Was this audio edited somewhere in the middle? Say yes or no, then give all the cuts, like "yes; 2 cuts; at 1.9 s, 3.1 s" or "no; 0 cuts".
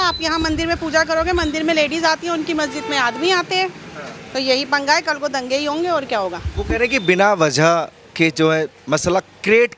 no; 0 cuts